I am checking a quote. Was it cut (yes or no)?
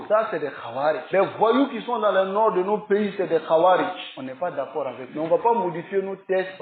no